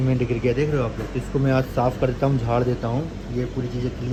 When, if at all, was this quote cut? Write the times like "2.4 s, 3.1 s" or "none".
none